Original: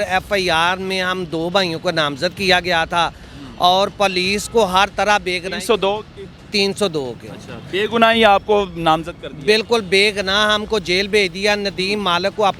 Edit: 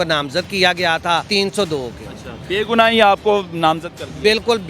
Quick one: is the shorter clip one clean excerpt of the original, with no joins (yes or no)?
no